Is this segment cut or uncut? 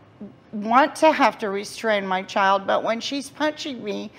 uncut